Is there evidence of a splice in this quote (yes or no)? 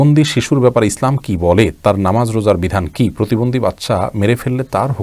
no